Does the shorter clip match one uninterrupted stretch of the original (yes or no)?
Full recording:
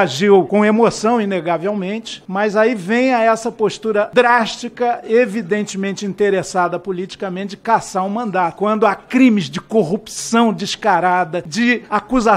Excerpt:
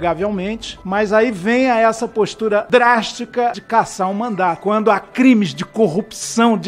no